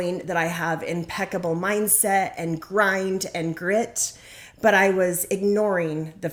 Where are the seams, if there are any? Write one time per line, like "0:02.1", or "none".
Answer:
none